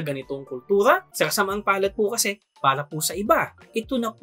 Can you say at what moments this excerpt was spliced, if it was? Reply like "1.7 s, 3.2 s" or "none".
1.1 s

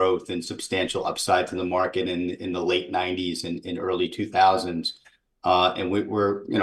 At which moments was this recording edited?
none

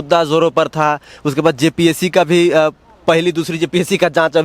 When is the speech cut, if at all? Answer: none

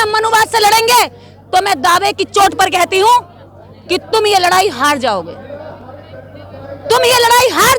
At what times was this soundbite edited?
none

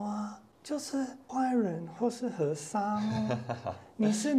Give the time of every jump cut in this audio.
1.2 s

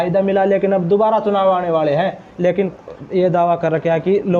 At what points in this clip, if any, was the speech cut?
2.7 s

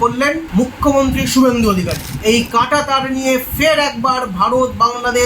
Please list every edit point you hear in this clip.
2.1 s

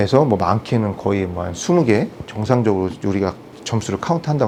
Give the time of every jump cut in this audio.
none

